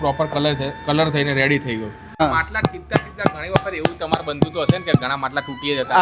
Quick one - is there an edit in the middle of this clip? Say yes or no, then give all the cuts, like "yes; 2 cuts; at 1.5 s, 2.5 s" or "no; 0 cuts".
yes; 1 cut; at 2.2 s